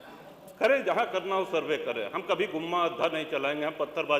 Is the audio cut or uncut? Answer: uncut